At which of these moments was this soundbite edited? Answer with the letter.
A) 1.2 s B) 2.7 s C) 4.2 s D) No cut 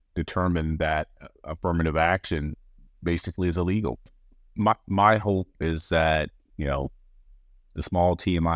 C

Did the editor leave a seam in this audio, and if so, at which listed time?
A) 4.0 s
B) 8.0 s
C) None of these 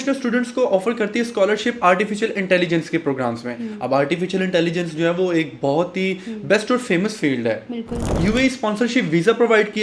B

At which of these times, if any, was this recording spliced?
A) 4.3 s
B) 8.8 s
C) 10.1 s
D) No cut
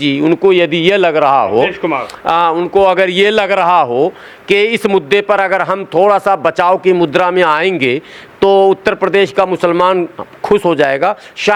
D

